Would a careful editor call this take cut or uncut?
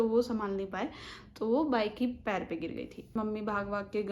uncut